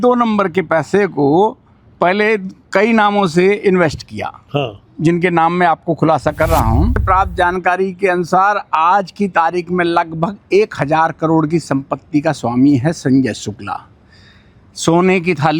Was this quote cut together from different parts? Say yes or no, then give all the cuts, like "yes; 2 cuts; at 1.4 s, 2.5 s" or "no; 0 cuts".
yes; 1 cut; at 7.0 s